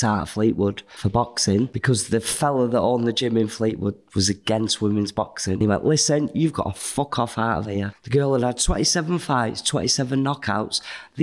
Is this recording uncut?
no; 4 cuts; at 0.9 s, 1.8 s, 5.6 s, 7.9 s

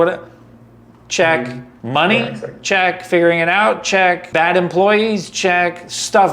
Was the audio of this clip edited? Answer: yes; 2 cuts; at 1.7 s, 4.2 s

